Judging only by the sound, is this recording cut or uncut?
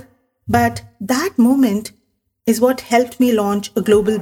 uncut